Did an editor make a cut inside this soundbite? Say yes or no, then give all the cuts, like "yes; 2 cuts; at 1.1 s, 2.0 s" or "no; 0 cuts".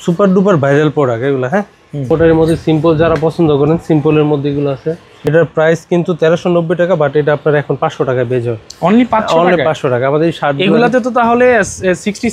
yes; 2 cuts; at 2.1 s, 5.1 s